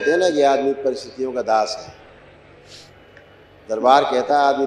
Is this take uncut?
yes; 0 cuts

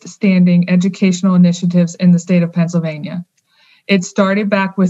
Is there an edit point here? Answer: no; 0 cuts

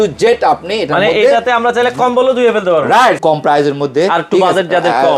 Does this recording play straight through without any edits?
no; 1 cut; at 3.2 s

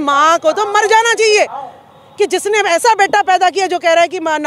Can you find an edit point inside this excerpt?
no; 0 cuts

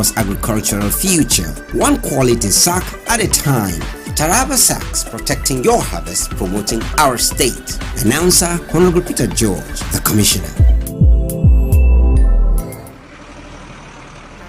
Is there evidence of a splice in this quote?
yes; 1 cut; at 12.9 s

